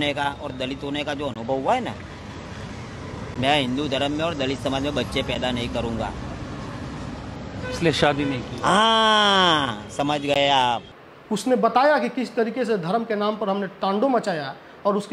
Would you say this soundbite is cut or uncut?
cut